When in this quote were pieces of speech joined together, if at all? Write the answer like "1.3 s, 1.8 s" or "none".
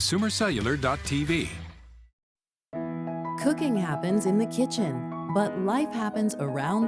1.7 s